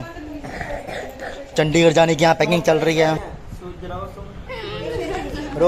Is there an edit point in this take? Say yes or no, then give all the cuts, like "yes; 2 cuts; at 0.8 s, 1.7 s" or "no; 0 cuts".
yes; 1 cut; at 3.2 s